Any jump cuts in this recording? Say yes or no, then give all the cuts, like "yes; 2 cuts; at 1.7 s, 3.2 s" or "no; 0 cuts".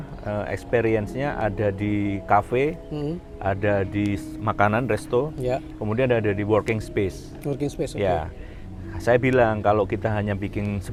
no; 0 cuts